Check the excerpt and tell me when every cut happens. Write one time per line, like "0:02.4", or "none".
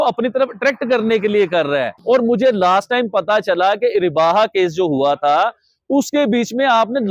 0:01.9